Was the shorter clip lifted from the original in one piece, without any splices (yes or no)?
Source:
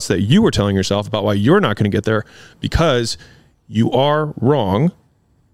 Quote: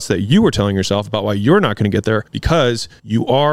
no